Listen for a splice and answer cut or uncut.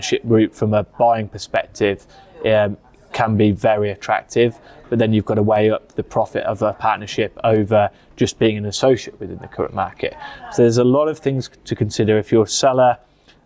uncut